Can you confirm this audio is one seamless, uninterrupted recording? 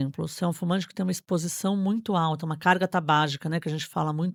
yes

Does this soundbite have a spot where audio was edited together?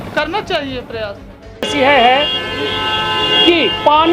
yes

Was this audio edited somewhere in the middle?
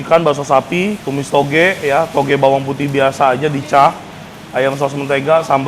yes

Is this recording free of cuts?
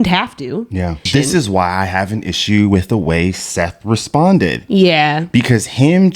no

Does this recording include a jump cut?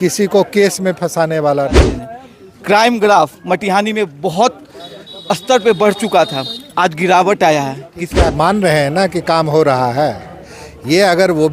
yes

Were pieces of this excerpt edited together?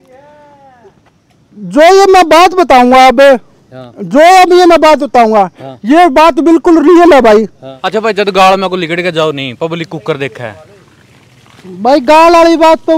yes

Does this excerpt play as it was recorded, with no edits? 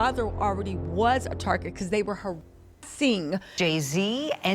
no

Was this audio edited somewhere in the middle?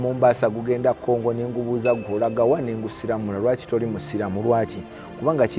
no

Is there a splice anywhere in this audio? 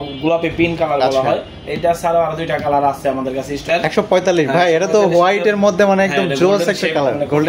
yes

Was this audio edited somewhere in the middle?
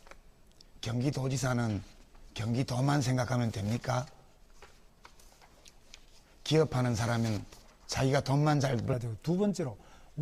no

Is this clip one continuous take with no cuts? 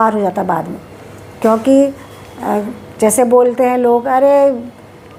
yes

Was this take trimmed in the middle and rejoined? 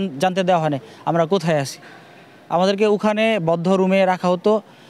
no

